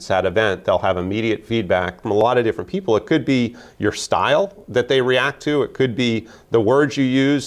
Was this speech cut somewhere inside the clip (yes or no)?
yes